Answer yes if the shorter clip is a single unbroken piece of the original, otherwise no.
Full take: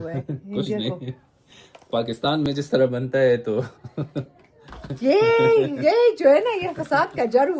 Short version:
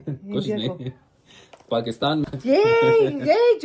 no